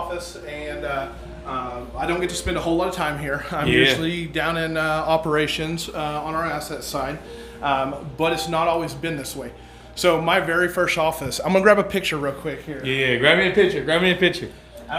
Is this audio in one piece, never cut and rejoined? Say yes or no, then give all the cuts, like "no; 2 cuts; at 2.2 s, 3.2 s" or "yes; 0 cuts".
yes; 0 cuts